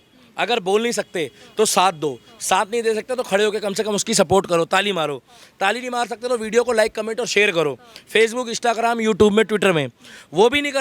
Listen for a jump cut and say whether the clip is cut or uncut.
uncut